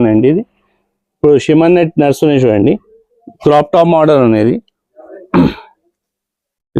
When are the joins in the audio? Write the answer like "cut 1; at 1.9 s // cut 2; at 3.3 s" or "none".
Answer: none